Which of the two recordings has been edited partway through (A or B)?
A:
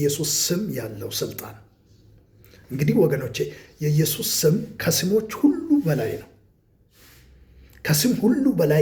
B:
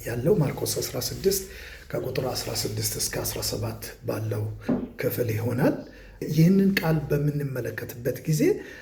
B